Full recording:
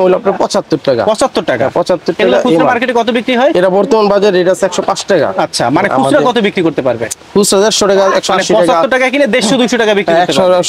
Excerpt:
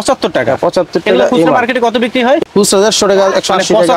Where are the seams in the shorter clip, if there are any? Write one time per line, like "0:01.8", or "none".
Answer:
0:02.4